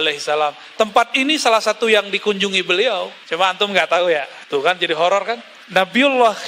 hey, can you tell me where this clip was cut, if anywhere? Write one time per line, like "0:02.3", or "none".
0:03.2
0:04.4
0:05.5